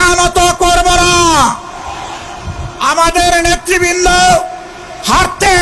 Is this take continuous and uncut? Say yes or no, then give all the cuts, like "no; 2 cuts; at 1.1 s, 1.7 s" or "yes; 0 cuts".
yes; 0 cuts